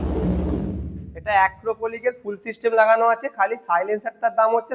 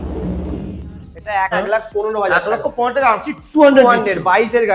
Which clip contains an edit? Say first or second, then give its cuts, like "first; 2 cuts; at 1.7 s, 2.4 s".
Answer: second; 1 cut; at 1.5 s